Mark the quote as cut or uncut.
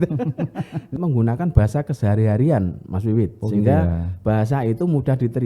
cut